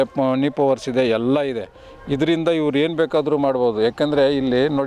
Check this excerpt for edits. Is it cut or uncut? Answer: uncut